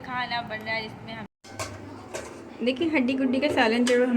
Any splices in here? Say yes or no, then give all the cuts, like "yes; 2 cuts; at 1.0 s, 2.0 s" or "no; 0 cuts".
yes; 1 cut; at 1.3 s